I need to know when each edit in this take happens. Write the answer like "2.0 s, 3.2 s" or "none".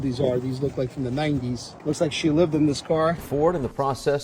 1.7 s, 3.2 s